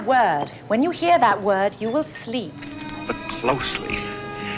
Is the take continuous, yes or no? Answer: no